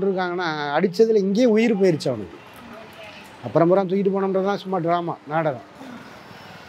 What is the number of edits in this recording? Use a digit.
0